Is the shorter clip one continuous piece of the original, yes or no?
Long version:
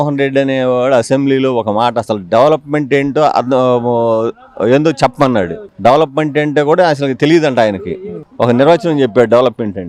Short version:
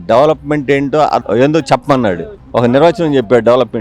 no